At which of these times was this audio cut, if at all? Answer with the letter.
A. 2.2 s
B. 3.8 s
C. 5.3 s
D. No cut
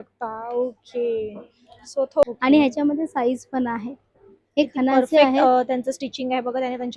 A